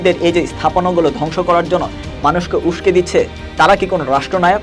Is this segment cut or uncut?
cut